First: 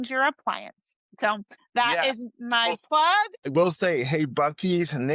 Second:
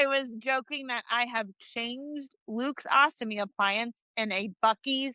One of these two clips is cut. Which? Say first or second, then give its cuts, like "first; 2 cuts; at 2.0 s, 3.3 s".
first; 2 cuts; at 1.3 s, 3.5 s